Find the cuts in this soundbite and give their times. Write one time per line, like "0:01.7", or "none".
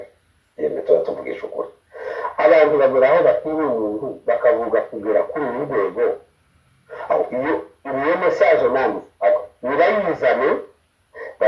none